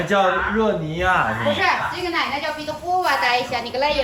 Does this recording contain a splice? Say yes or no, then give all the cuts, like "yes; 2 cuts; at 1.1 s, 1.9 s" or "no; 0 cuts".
no; 0 cuts